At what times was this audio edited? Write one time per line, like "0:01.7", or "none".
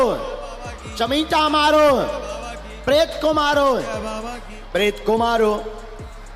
none